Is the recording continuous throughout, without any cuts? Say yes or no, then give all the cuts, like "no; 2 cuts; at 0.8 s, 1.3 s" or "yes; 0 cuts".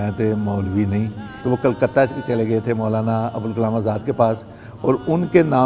no; 1 cut; at 1.3 s